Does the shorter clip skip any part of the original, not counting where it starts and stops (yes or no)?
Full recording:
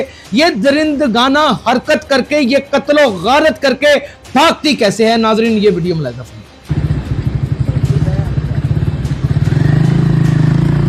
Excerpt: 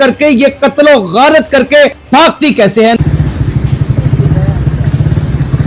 yes